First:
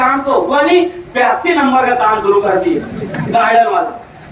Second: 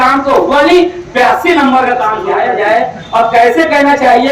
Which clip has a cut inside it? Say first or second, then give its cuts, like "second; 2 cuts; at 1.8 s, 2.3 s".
second; 1 cut; at 2.2 s